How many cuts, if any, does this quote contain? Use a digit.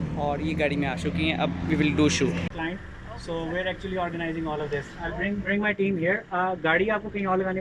1